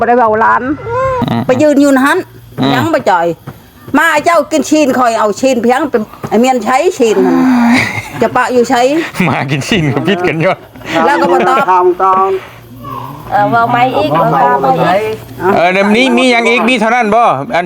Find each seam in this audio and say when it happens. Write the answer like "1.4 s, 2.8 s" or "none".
1.2 s